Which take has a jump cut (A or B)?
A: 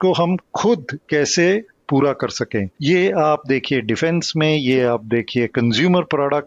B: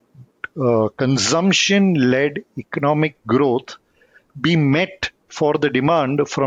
A